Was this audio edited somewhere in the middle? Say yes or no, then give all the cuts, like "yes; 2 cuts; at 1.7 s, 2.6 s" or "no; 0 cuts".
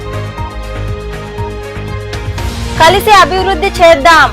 yes; 1 cut; at 2.2 s